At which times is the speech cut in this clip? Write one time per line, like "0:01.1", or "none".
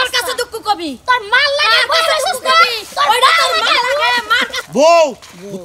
0:04.5